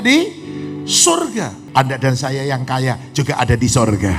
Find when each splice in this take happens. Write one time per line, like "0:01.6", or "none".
0:01.6